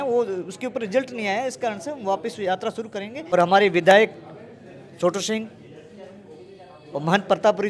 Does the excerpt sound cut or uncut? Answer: cut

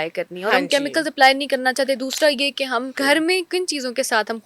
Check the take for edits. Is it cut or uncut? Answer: cut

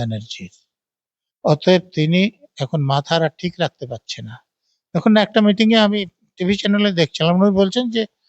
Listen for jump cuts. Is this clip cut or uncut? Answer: uncut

